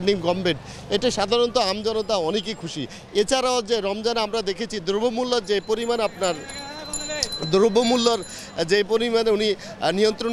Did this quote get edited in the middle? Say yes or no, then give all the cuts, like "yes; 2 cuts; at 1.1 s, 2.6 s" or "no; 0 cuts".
no; 0 cuts